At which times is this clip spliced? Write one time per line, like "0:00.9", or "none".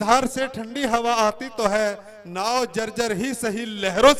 none

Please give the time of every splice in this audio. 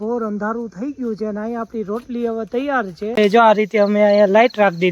0:03.2

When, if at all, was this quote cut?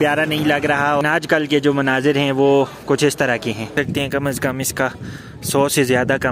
0:01.0
0:03.7

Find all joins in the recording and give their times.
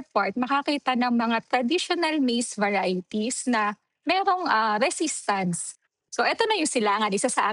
0:05.8

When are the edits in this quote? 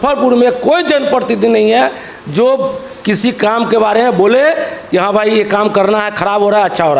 none

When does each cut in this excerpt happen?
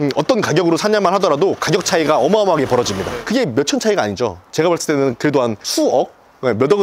none

